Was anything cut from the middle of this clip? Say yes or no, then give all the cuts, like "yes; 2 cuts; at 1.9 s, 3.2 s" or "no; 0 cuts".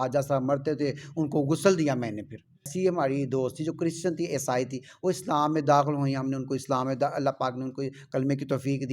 yes; 1 cut; at 2.7 s